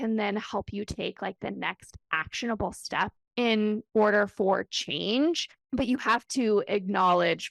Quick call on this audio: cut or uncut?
uncut